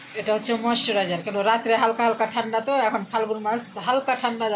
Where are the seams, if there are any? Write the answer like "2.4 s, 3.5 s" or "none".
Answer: none